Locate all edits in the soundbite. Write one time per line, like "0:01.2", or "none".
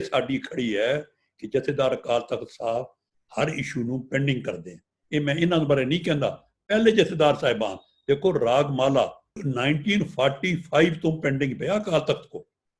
0:09.3